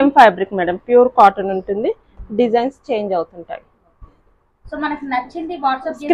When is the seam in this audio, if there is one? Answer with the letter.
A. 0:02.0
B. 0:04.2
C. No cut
C